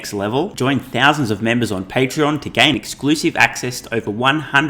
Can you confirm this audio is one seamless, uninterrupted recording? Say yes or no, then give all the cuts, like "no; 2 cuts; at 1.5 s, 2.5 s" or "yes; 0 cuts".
yes; 0 cuts